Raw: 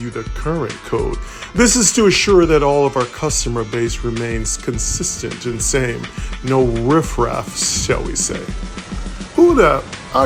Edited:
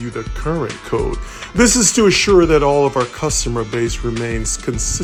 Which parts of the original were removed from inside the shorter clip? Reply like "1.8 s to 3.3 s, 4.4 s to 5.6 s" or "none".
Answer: none